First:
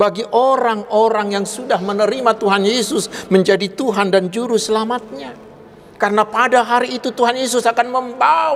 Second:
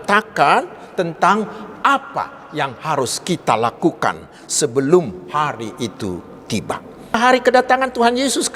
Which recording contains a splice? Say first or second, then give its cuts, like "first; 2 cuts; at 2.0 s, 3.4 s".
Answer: second; 1 cut; at 7.2 s